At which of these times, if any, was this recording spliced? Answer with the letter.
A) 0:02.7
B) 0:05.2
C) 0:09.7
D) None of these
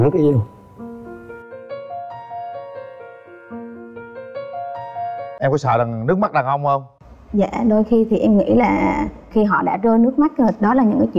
B